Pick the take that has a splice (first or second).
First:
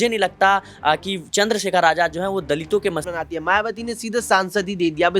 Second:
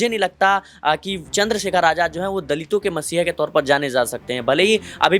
first